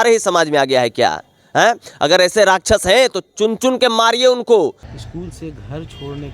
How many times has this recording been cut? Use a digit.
1